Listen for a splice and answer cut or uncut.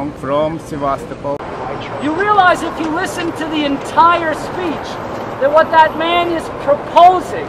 cut